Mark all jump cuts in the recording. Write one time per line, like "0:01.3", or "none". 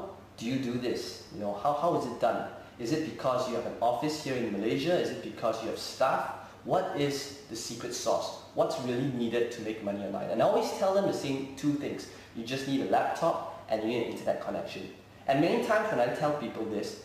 0:09.1